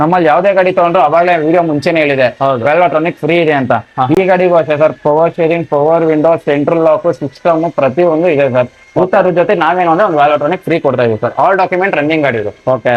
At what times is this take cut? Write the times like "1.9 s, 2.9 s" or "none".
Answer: none